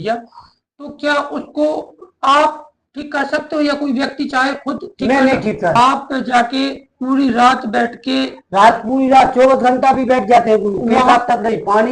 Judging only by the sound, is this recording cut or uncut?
cut